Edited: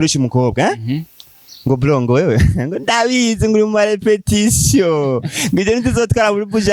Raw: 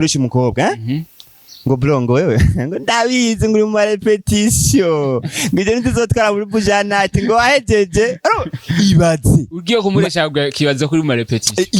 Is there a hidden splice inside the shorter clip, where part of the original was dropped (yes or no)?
no